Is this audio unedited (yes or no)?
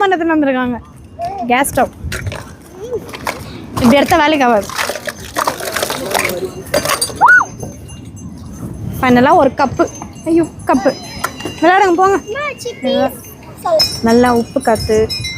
no